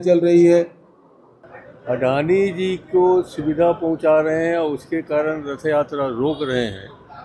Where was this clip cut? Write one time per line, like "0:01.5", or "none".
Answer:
0:01.4

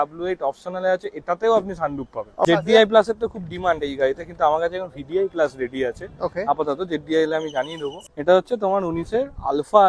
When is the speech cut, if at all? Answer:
0:02.4
0:07.9

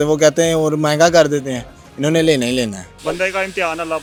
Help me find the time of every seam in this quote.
none

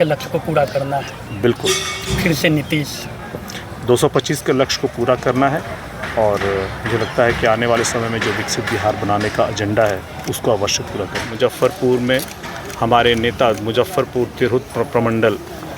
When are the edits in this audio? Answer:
0:11.3

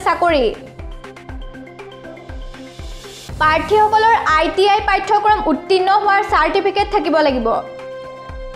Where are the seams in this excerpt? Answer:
0:00.8
0:03.3
0:07.6

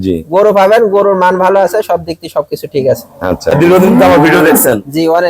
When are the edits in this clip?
0:03.5

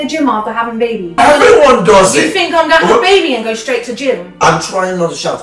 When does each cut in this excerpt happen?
0:01.1

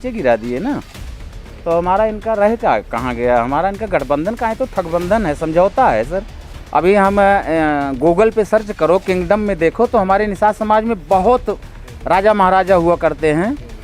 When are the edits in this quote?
0:06.5

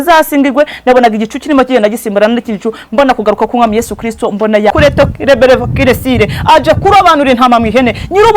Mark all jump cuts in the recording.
0:04.7

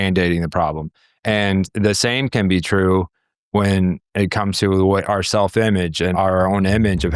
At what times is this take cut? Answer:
0:06.1

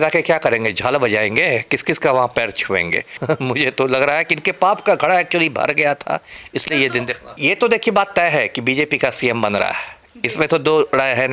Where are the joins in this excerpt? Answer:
0:03.2
0:07.2

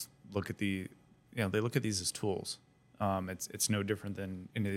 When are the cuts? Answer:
none

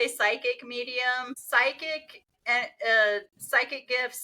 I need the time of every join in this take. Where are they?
0:01.3

